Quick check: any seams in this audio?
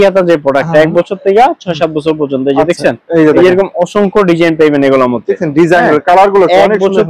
no; 0 cuts

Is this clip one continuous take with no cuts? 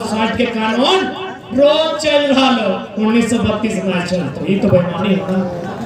yes; 0 cuts

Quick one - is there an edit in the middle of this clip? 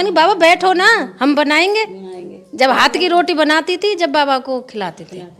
no; 0 cuts

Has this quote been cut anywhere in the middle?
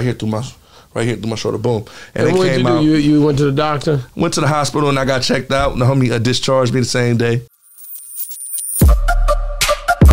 yes; 1 cut; at 7.5 s

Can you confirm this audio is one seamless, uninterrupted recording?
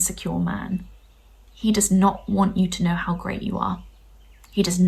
no; 1 cut; at 1.3 s

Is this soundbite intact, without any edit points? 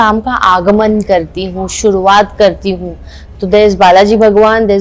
yes; 0 cuts

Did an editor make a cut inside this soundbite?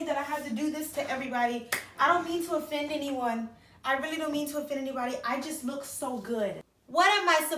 yes; 1 cut; at 6.7 s

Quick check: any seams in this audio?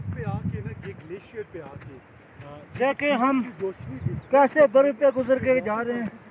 no; 0 cuts

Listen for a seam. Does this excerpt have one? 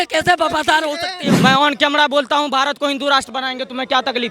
yes; 1 cut; at 1.4 s

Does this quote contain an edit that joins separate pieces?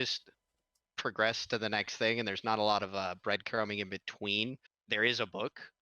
yes; 1 cut; at 4.7 s

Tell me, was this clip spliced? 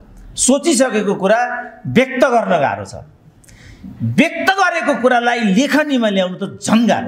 no; 0 cuts

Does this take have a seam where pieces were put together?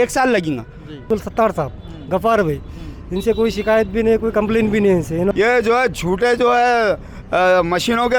yes; 2 cuts; at 1.0 s, 5.3 s

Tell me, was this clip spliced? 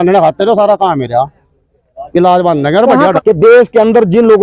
yes; 1 cut; at 3.2 s

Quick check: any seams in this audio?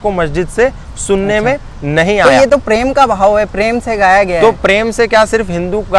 no; 0 cuts

